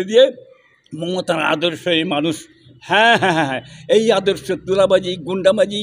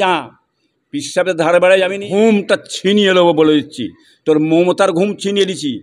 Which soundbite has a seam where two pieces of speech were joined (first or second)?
second